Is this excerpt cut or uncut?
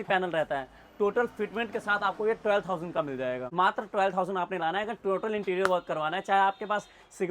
cut